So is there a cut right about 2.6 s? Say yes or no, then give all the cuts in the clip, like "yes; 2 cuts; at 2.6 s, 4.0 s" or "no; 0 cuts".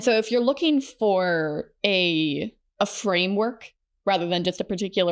yes; 1 cut; at 2.6 s